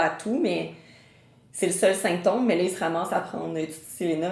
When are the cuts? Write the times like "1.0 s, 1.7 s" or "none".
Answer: none